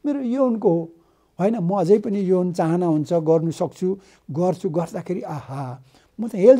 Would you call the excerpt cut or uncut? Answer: uncut